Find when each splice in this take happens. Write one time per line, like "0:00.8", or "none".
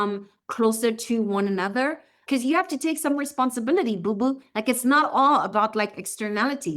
0:02.2